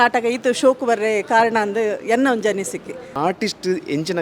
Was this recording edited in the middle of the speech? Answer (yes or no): yes